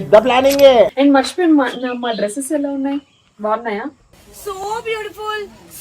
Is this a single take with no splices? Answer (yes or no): no